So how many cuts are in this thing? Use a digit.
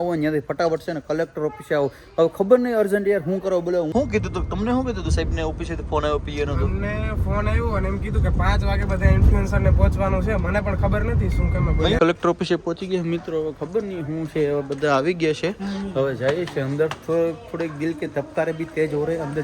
2